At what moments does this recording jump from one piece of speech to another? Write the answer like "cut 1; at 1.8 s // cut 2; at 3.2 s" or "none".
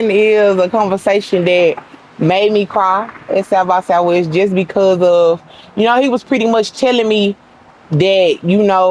none